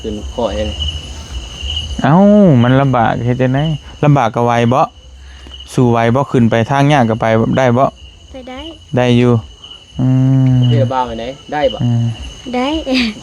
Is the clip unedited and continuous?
yes; 0 cuts

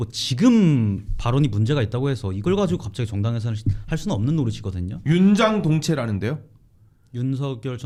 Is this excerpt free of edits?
yes; 0 cuts

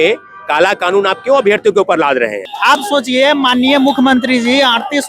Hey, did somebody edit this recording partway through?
yes; 1 cut; at 2.5 s

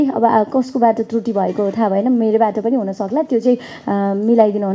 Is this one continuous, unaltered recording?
yes; 0 cuts

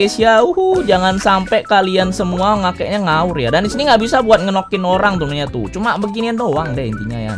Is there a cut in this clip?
no; 0 cuts

